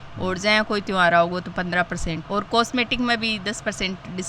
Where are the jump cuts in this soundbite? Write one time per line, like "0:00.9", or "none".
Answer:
0:02.2